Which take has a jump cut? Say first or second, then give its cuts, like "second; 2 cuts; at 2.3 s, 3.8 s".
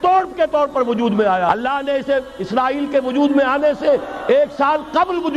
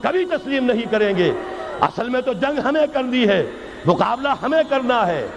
first; 1 cut; at 1.5 s